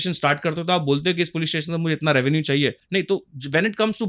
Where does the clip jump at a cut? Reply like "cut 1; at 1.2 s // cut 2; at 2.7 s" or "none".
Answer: cut 1; at 2.8 s

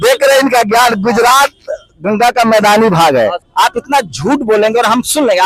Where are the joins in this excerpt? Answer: cut 1; at 3.4 s

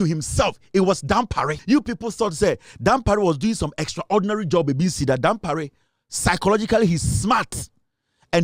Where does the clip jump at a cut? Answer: cut 1; at 1.6 s

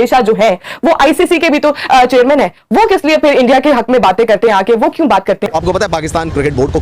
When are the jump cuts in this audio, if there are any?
cut 1; at 5.5 s

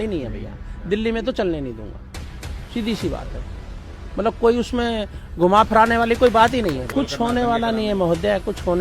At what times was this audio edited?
cut 1; at 6.8 s

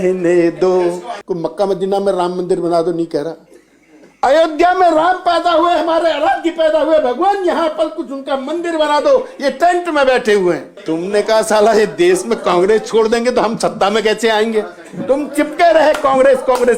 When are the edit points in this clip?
cut 1; at 1.1 s // cut 2; at 10.7 s

